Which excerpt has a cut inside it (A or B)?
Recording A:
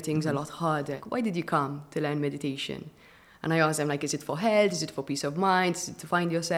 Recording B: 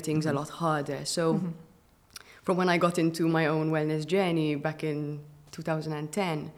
A